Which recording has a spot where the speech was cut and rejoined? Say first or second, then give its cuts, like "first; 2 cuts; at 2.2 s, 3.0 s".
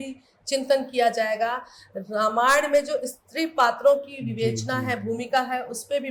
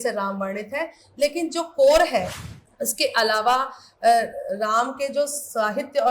second; 1 cut; at 2.4 s